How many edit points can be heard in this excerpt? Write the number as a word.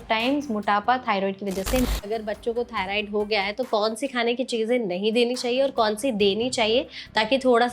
one